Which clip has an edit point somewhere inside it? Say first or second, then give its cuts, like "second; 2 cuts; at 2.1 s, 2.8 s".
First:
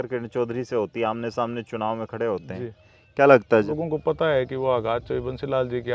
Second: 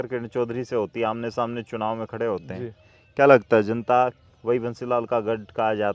first; 1 cut; at 3.7 s